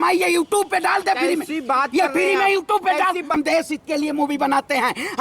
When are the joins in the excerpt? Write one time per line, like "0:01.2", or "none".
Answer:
0:03.3